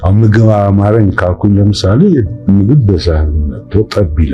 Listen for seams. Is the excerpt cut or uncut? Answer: cut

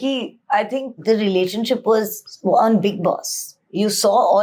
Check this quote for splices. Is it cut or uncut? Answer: cut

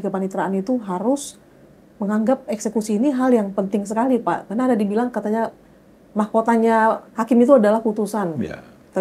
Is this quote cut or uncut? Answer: uncut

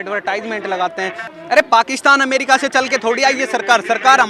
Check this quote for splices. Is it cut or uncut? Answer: cut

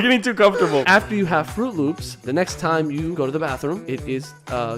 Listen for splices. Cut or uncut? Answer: cut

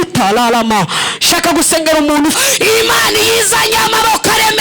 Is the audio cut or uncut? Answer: cut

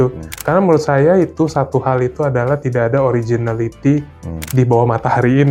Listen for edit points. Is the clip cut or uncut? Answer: uncut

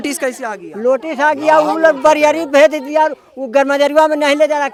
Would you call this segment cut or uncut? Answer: uncut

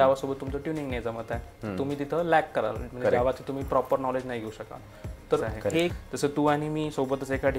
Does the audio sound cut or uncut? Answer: cut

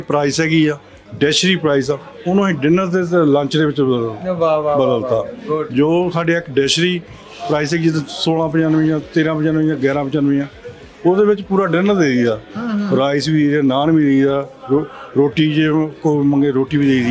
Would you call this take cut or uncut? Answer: uncut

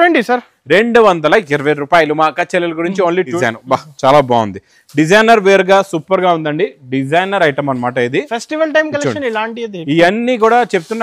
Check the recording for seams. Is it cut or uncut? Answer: cut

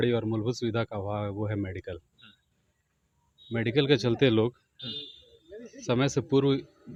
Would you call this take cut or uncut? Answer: uncut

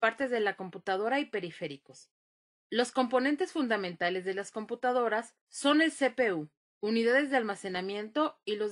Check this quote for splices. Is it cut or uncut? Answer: cut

